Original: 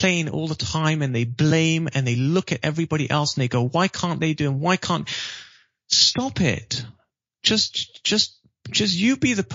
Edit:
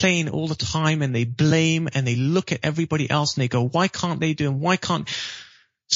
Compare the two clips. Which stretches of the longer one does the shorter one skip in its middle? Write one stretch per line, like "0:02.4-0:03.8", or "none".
none